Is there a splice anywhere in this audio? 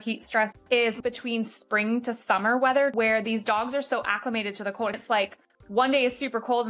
yes; 3 cuts; at 1.0 s, 2.9 s, 5.0 s

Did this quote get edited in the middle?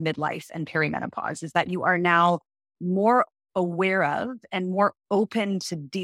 no; 0 cuts

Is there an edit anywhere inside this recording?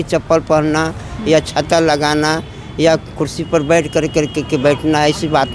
no; 0 cuts

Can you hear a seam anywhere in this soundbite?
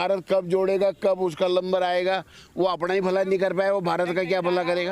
no; 0 cuts

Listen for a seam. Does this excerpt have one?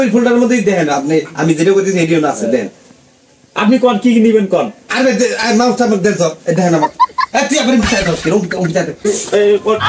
yes; 1 cut; at 9.0 s

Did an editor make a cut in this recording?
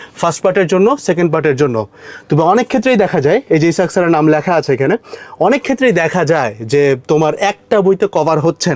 no; 0 cuts

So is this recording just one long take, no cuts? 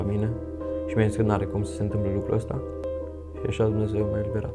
no; 1 cut; at 2.8 s

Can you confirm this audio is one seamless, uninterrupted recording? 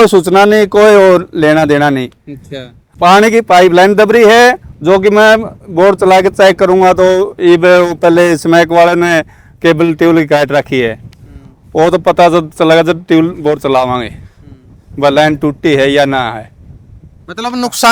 yes; 0 cuts

